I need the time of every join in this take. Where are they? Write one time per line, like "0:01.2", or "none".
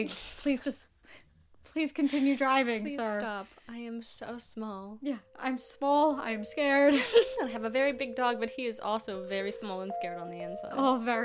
none